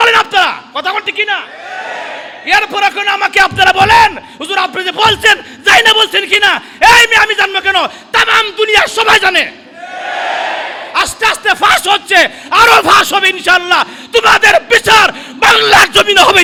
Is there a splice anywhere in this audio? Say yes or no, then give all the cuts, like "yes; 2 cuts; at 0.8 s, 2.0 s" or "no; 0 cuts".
no; 0 cuts